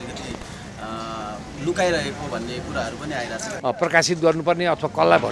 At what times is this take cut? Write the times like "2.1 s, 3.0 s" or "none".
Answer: 3.5 s

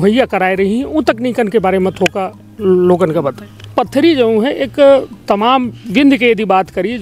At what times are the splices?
3.7 s

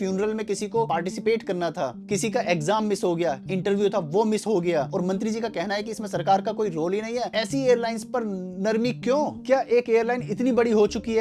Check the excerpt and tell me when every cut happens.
0.9 s, 3.4 s, 4.9 s, 7.3 s, 9.4 s

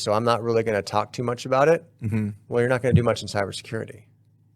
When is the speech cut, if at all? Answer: none

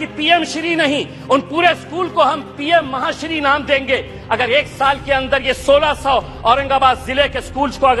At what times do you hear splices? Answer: none

